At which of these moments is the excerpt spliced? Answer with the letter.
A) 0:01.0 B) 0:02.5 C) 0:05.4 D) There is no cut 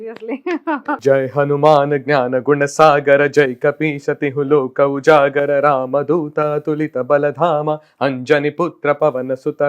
A